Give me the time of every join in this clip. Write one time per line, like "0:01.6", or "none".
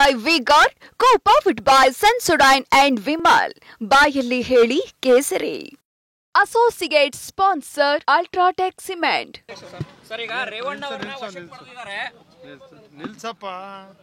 0:09.5